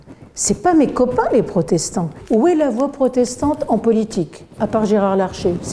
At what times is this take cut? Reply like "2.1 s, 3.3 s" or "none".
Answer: 2.2 s